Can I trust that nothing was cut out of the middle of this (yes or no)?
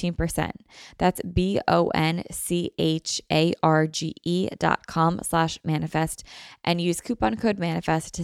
yes